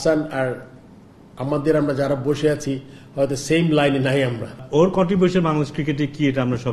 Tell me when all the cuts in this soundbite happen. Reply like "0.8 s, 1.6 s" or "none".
4.6 s